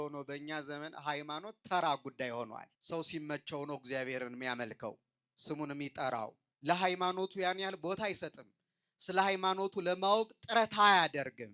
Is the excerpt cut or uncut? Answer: cut